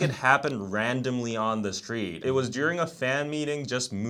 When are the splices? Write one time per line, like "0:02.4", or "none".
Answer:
none